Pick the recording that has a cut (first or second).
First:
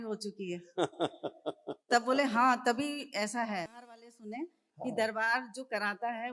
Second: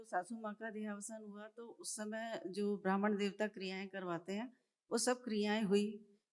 first